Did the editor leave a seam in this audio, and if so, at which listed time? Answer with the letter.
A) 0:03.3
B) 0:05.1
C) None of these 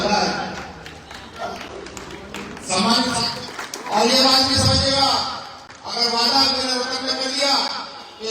A